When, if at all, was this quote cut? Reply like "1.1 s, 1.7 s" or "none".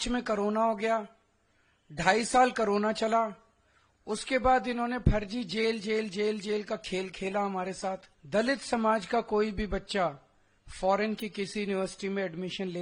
8.1 s